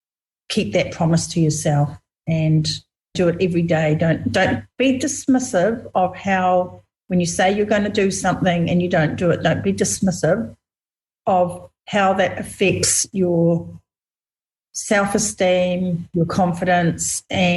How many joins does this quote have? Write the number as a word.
one